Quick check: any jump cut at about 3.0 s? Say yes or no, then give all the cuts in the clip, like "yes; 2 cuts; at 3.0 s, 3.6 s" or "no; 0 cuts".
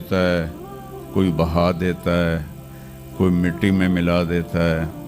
no; 0 cuts